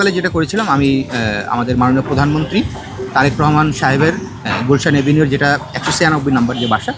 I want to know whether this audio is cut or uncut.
uncut